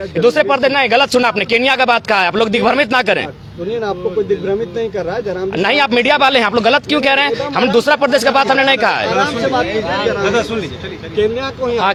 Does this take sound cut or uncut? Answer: uncut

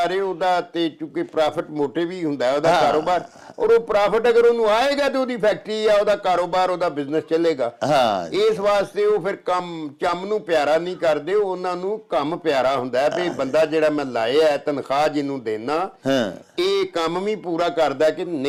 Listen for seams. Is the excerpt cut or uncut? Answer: uncut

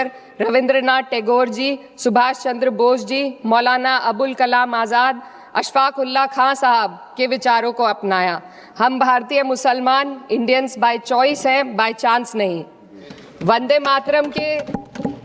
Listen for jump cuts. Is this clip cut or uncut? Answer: uncut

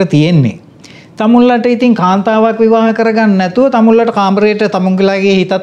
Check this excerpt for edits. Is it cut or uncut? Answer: uncut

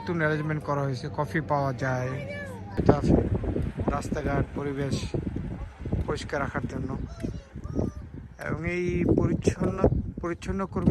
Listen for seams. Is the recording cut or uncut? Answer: cut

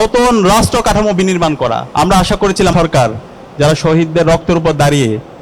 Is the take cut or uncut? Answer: cut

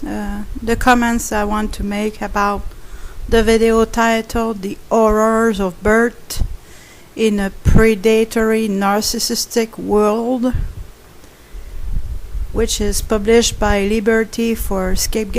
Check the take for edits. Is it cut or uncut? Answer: uncut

